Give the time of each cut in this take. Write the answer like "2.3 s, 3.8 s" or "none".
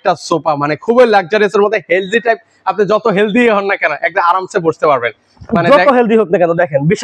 none